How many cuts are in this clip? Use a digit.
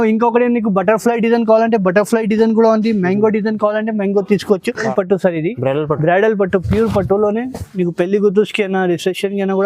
1